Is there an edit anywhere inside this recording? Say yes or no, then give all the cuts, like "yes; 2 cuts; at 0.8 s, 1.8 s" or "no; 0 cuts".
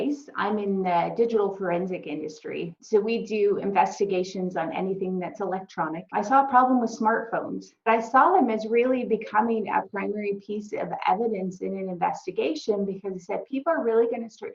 yes; 3 cuts; at 2.8 s, 6.1 s, 7.9 s